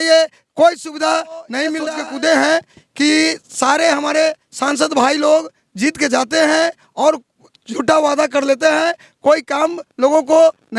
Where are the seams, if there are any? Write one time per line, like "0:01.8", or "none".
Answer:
0:01.8